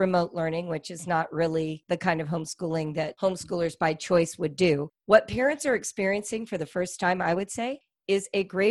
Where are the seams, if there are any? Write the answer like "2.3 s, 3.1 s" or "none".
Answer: 4.9 s